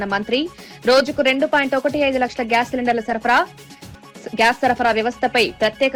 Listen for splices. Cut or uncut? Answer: uncut